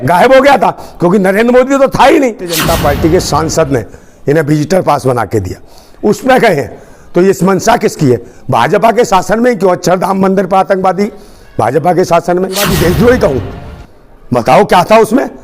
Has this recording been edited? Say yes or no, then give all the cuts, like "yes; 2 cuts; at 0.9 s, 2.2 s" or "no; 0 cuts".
yes; 2 cuts; at 2.6 s, 12.7 s